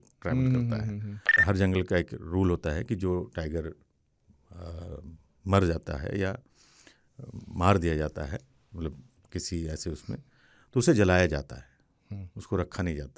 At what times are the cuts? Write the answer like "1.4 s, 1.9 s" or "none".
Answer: 1.4 s